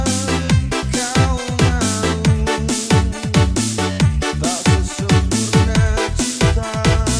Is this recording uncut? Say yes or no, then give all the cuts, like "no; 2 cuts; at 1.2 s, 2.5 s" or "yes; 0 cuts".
yes; 0 cuts